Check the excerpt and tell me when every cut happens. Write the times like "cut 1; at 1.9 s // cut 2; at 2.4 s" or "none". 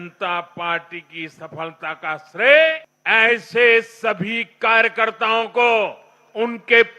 cut 1; at 2.9 s